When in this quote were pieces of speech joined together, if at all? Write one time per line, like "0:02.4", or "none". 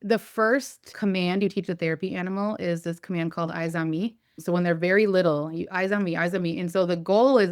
0:00.9
0:04.3